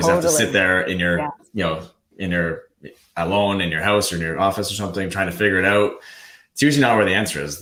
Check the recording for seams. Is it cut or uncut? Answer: uncut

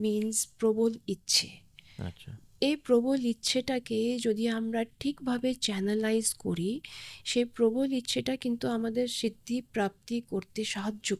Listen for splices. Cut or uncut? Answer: uncut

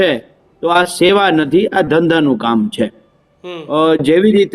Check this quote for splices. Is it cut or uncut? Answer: uncut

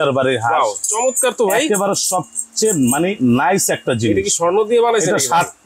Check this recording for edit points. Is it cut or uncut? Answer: uncut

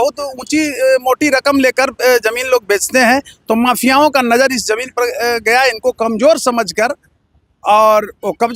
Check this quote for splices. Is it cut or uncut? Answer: uncut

